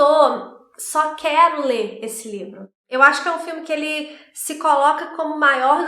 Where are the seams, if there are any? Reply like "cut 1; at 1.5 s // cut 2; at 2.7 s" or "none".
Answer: cut 1; at 2.8 s